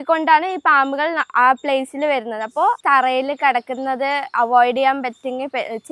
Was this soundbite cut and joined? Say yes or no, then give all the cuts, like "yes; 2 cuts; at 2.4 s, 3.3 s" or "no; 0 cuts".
yes; 1 cut; at 2.8 s